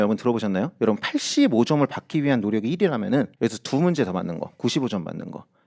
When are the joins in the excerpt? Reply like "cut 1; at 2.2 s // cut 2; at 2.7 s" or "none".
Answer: none